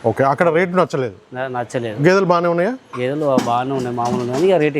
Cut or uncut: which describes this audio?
uncut